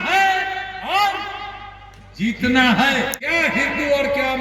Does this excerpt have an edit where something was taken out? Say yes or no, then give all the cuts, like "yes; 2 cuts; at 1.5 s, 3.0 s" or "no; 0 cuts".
yes; 1 cut; at 3.2 s